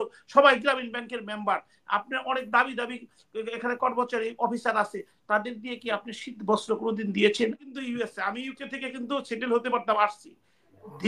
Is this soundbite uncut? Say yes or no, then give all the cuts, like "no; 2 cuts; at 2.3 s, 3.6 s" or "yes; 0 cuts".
no; 1 cut; at 7.6 s